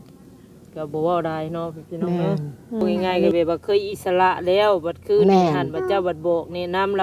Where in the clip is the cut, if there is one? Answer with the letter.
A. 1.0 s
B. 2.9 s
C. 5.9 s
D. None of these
B